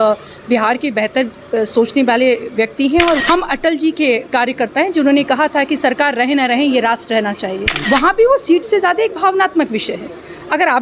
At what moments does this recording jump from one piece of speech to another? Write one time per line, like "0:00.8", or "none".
0:03.2
0:07.7